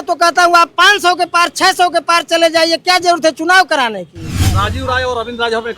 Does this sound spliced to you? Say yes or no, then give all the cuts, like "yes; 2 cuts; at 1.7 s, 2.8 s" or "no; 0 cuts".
yes; 1 cut; at 4.6 s